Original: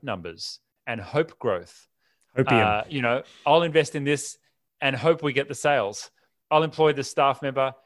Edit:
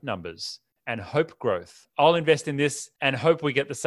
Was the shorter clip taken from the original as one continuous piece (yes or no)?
no